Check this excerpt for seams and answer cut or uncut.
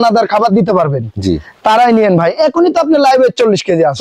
uncut